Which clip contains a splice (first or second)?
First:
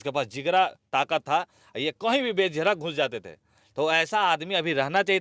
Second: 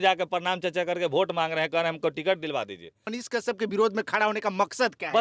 second